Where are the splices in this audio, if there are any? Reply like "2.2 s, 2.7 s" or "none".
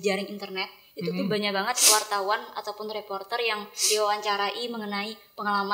none